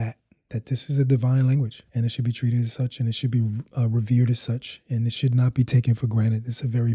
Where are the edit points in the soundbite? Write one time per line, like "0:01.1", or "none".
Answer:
0:01.8